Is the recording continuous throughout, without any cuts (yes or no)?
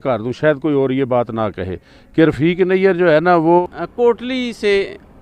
no